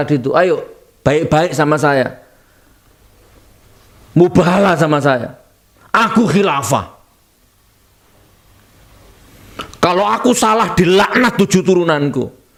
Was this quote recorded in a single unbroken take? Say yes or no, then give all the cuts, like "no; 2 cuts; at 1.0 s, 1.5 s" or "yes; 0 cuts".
yes; 0 cuts